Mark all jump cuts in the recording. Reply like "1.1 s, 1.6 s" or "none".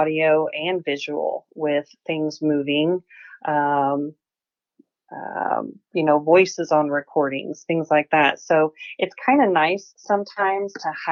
none